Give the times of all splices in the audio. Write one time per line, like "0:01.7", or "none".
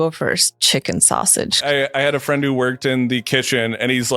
0:01.6